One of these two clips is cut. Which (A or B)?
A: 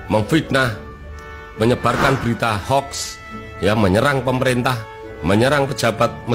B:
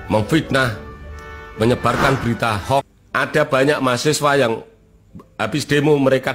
B